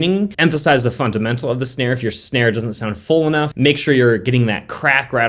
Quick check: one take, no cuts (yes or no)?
yes